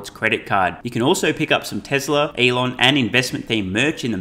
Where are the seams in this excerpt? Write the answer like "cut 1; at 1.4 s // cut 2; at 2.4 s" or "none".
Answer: cut 1; at 2.3 s